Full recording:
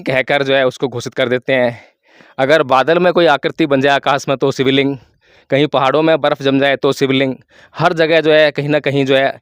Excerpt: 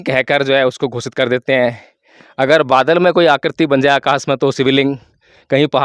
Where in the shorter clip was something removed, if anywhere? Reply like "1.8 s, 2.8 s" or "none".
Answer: none